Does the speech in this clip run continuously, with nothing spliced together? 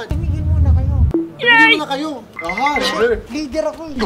no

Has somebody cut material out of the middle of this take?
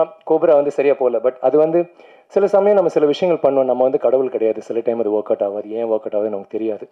no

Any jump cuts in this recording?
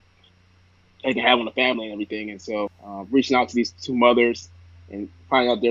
yes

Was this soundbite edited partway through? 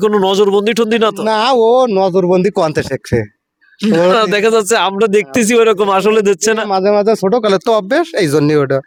no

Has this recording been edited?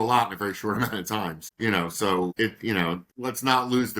yes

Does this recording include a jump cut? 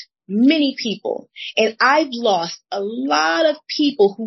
no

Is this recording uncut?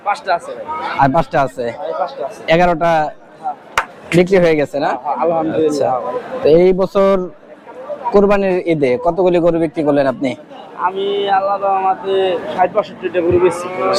yes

